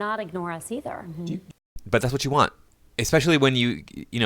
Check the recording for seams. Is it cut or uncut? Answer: uncut